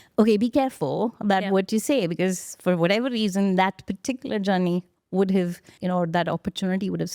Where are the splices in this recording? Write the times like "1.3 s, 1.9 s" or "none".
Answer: 5.7 s